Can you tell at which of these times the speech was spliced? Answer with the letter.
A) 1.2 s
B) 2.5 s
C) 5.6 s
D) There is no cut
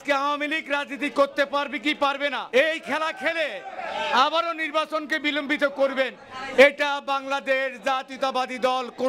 B